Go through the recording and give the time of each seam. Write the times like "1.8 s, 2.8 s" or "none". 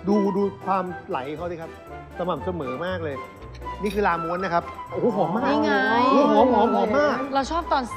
none